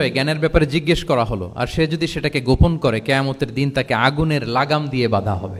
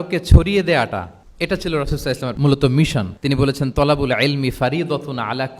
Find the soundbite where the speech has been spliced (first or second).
second